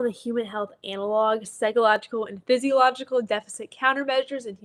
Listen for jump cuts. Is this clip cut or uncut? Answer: uncut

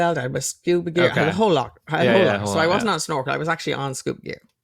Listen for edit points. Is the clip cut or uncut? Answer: uncut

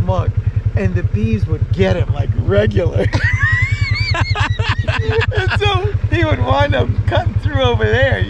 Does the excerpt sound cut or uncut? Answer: uncut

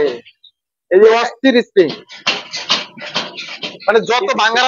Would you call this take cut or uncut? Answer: uncut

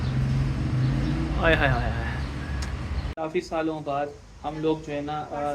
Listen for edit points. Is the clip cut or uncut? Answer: cut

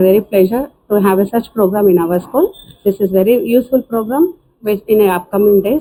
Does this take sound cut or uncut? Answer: uncut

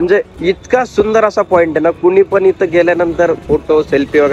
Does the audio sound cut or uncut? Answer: uncut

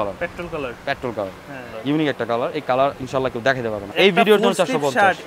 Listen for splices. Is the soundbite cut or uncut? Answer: cut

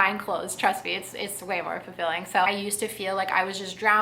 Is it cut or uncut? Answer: cut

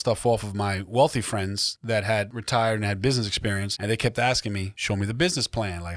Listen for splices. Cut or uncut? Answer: cut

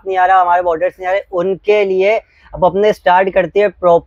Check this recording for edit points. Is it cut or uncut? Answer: uncut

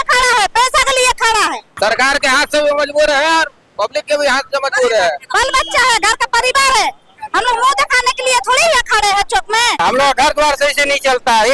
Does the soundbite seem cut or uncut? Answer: cut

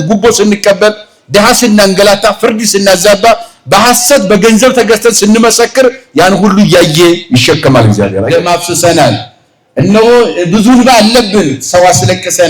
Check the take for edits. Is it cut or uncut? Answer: cut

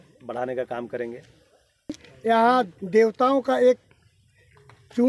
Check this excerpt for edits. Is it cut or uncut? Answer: cut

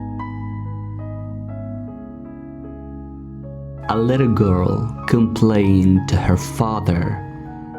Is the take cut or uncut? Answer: cut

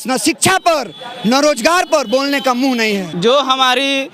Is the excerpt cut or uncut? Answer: cut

